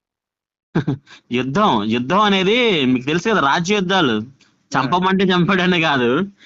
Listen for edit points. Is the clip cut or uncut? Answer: uncut